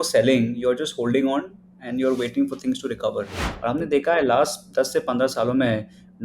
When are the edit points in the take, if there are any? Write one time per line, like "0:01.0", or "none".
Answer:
0:03.4